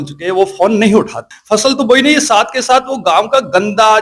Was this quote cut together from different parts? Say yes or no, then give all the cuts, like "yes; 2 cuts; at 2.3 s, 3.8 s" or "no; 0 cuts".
yes; 1 cut; at 1.3 s